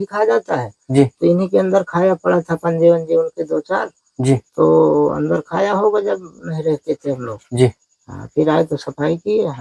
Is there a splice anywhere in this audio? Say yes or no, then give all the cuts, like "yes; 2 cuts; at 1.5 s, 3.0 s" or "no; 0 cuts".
no; 0 cuts